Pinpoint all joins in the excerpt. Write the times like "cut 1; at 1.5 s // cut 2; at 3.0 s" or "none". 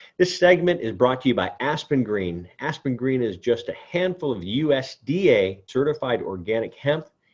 cut 1; at 5.7 s